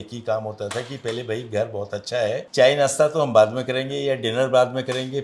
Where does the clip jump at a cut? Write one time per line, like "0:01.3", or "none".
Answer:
none